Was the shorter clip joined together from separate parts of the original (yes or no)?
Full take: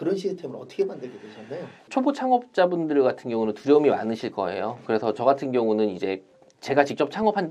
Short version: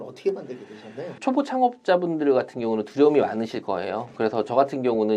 yes